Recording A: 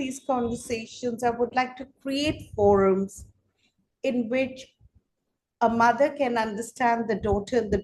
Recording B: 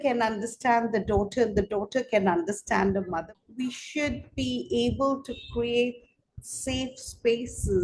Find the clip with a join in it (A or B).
B